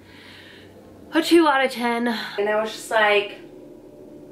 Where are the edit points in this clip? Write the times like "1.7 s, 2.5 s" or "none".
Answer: 2.3 s